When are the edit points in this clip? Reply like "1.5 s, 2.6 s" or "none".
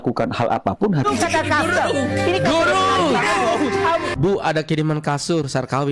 1.0 s, 4.1 s